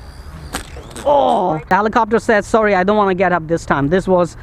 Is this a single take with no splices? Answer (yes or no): no